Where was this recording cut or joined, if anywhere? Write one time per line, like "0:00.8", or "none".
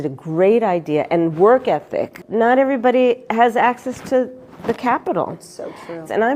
0:02.2